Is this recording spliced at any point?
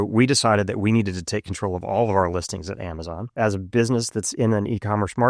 yes; 1 cut; at 3.2 s

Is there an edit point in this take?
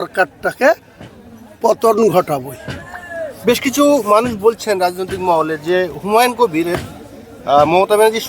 no; 0 cuts

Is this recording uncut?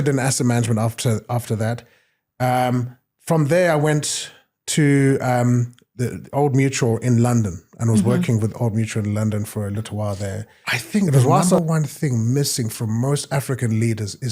no; 1 cut; at 11.6 s

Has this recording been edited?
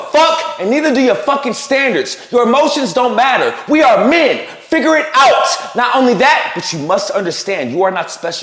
no; 0 cuts

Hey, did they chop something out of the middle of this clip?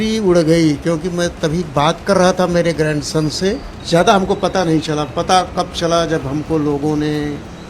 yes; 1 cut; at 3.7 s

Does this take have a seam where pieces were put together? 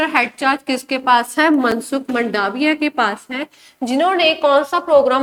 no; 0 cuts

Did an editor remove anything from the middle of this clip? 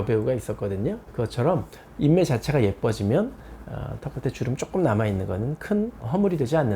yes; 1 cut; at 1.8 s

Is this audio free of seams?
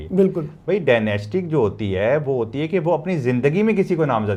yes; 0 cuts

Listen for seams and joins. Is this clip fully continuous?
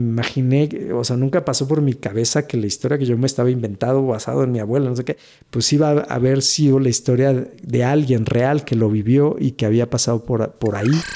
yes; 0 cuts

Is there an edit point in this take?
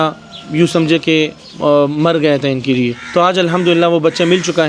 yes; 2 cuts; at 1.4 s, 3.0 s

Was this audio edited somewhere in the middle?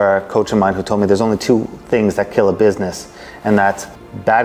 no; 0 cuts

